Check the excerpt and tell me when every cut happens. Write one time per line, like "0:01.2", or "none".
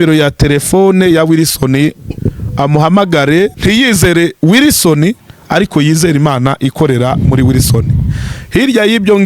0:03.6